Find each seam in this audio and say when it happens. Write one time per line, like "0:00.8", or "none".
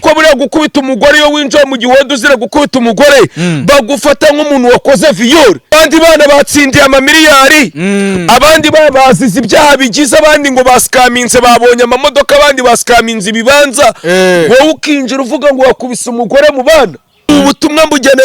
0:05.7
0:17.3